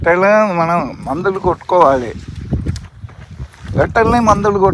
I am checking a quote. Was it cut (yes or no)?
no